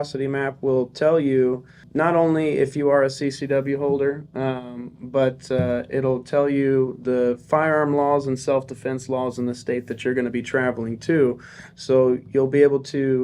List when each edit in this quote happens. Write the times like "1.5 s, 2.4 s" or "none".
none